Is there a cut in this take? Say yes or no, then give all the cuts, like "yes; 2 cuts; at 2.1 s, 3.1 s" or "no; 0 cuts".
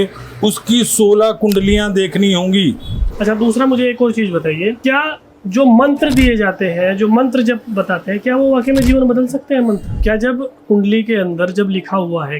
yes; 3 cuts; at 3.0 s, 4.8 s, 9.9 s